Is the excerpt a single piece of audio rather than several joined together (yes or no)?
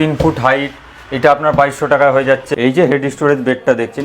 no